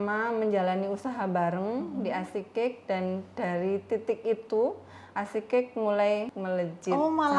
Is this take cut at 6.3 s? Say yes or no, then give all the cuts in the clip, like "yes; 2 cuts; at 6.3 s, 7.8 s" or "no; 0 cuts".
yes; 1 cut; at 6.3 s